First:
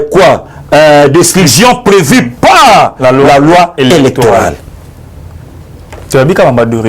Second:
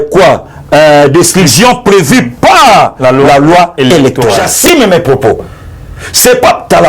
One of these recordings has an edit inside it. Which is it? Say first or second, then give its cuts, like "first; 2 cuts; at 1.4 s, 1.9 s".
second; 1 cut; at 4.5 s